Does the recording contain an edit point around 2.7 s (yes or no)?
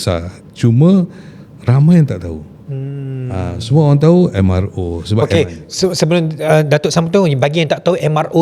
no